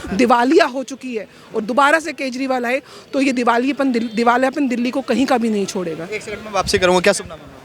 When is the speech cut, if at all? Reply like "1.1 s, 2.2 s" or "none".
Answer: none